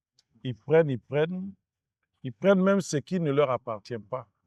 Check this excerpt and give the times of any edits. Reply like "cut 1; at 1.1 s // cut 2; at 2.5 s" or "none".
none